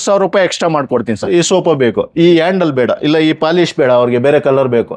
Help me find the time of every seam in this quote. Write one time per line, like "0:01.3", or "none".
0:01.2